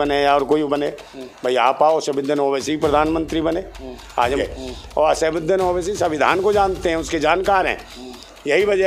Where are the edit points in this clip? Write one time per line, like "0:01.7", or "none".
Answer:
0:04.4